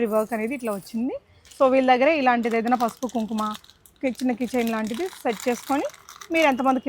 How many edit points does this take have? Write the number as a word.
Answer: zero